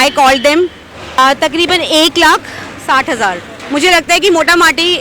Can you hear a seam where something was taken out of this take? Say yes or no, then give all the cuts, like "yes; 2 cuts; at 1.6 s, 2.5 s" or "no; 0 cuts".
yes; 2 cuts; at 1.2 s, 3.5 s